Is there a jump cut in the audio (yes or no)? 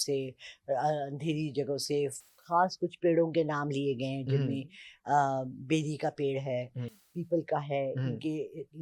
no